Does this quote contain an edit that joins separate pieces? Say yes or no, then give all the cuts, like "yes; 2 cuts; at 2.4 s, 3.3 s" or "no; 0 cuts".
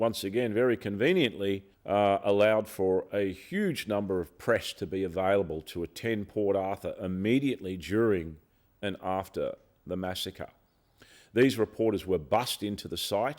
yes; 1 cut; at 1.7 s